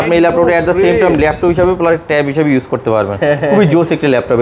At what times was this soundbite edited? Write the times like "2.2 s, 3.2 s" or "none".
none